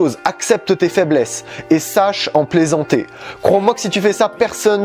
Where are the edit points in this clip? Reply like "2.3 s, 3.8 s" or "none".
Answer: none